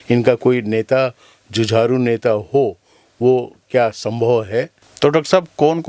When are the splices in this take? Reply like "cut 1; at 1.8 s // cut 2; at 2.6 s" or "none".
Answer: cut 1; at 4.8 s